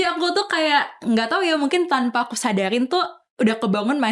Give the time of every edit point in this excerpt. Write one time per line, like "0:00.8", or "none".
none